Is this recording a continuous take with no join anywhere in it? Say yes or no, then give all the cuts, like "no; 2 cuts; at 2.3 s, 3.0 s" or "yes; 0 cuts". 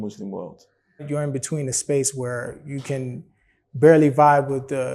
no; 1 cut; at 1.0 s